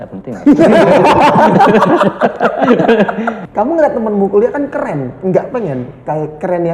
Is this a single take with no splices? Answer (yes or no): no